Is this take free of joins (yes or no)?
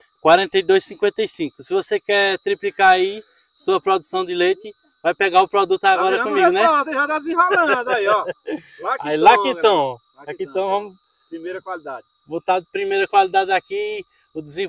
yes